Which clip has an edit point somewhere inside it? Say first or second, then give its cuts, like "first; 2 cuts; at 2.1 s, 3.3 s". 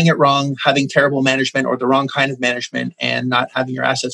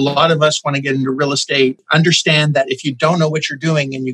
second; 1 cut; at 1.8 s